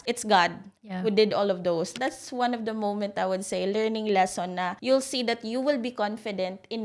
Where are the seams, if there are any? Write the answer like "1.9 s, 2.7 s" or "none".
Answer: 1.9 s